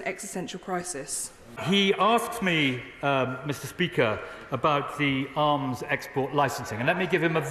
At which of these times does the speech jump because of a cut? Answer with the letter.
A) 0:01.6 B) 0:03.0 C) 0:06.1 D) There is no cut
A